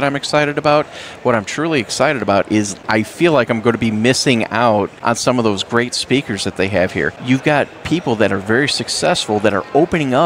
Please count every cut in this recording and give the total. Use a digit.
3